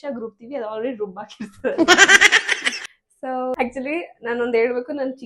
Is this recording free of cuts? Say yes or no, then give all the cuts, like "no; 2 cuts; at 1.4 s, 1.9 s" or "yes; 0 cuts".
no; 1 cut; at 3.5 s